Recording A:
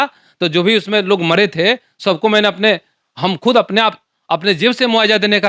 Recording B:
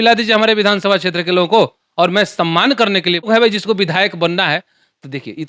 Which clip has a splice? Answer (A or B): B